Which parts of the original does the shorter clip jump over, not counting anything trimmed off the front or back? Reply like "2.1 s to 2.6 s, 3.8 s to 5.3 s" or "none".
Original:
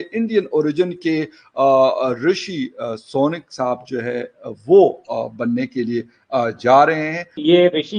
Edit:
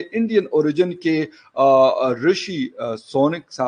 none

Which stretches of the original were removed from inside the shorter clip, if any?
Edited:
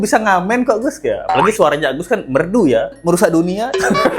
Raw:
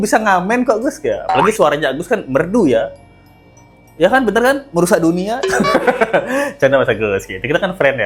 3.0 s to 4.6 s

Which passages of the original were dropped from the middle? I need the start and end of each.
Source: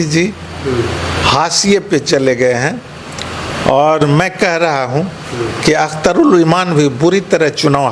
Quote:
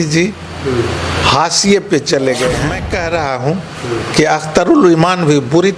2.8 s to 4.3 s

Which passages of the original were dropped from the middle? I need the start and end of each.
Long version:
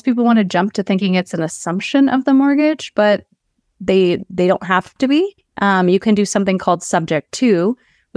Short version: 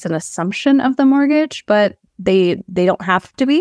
3.3 s to 3.7 s

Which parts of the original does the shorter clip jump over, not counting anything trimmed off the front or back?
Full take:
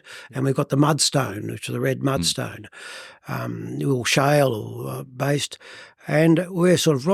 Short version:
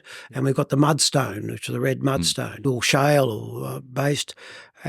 2.6 s to 3.9 s

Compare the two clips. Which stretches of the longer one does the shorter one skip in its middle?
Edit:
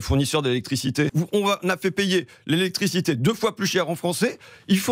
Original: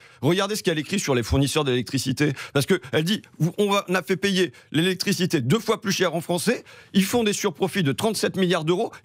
2.3 s to 3.4 s

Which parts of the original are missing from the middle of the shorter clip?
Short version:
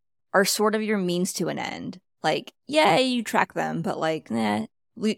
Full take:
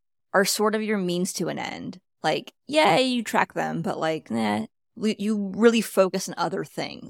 none

